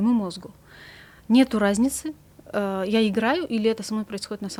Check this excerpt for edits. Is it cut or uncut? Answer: uncut